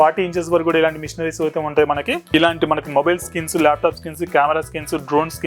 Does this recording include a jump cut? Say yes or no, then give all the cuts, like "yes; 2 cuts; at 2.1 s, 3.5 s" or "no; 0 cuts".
yes; 1 cut; at 2.2 s